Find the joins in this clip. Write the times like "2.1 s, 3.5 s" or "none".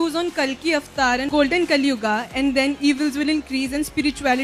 1.3 s